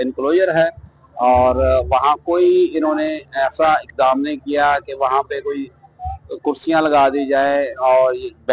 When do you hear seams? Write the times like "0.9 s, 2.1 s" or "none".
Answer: none